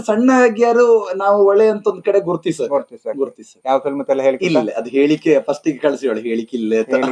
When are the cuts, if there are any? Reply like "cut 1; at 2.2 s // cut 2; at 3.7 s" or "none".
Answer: cut 1; at 3.5 s

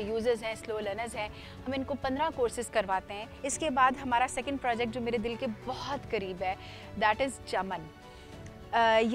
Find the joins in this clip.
cut 1; at 3.2 s

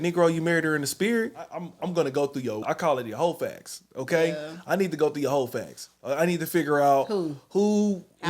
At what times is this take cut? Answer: cut 1; at 1.6 s // cut 2; at 2.6 s

